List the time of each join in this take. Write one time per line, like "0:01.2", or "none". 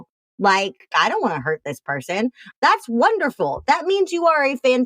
0:00.9
0:02.4